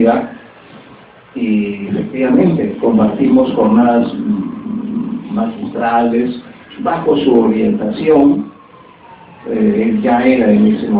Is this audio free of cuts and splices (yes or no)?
no